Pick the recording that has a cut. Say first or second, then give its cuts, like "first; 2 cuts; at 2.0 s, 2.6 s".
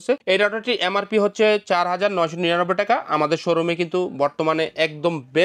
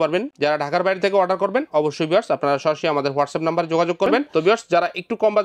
second; 1 cut; at 4.3 s